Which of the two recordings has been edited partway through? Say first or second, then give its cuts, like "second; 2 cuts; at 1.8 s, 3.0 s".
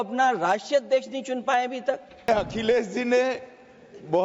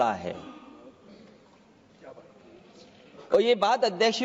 first; 1 cut; at 2.3 s